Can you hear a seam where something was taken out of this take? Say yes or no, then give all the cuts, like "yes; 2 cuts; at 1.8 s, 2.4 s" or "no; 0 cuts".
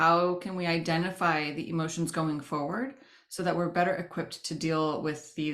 no; 0 cuts